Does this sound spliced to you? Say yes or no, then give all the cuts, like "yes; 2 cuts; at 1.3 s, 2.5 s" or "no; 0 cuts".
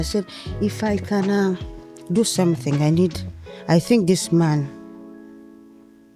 no; 0 cuts